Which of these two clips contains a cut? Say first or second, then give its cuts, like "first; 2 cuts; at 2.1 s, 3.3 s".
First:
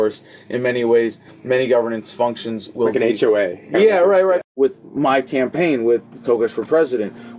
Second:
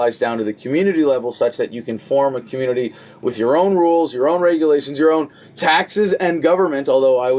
first; 1 cut; at 4.6 s